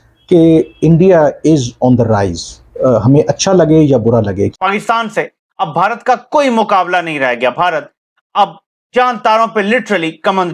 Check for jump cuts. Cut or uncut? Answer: cut